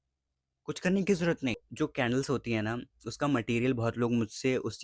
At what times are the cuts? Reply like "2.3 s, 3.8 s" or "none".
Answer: 1.7 s